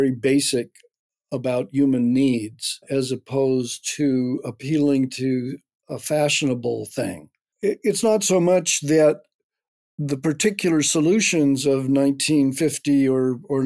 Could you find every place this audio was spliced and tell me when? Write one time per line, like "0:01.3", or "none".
0:02.8
0:07.4

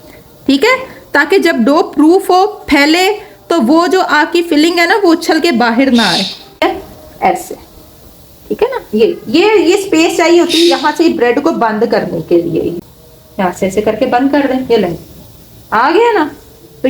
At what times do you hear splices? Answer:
0:06.6
0:12.8

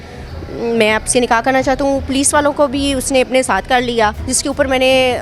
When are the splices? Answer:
0:04.3

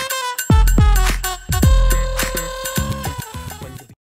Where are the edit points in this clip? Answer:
0:01.4

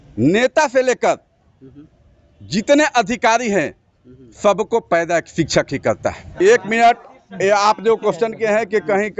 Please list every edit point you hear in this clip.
0:06.2

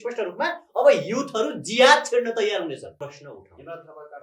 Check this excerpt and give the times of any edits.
0:03.0

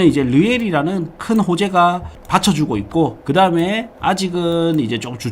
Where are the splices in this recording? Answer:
0:02.1
0:03.2

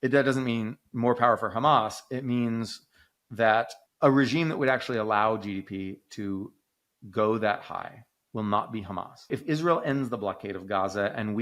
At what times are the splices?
0:03.8
0:09.2

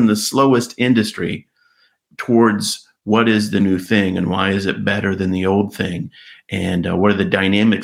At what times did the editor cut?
none

